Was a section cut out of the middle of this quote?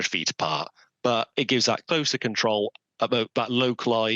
no; 0 cuts

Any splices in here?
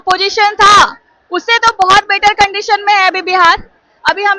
no; 0 cuts

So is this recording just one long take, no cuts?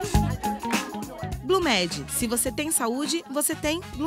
no; 1 cut; at 1.0 s

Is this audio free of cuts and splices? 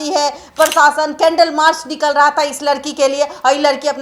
yes; 0 cuts

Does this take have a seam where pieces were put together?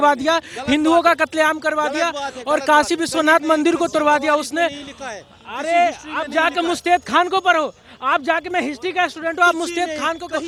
no; 0 cuts

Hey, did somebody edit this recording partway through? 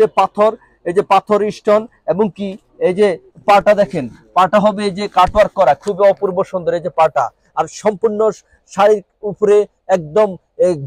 no; 0 cuts

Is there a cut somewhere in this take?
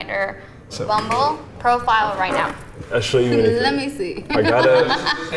no; 0 cuts

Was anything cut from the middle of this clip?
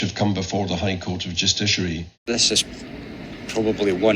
yes; 1 cut; at 2.1 s

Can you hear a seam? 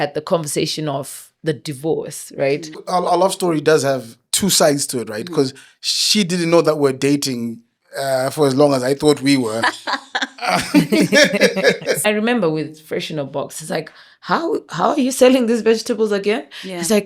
yes; 2 cuts; at 2.8 s, 12.0 s

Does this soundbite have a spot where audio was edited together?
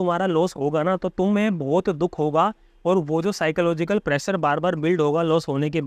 no; 0 cuts

